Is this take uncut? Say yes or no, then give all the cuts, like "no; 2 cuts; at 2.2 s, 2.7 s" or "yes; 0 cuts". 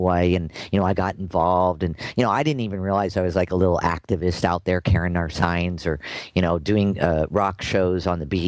yes; 0 cuts